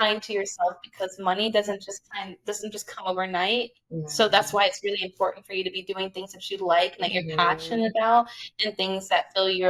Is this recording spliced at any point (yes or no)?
no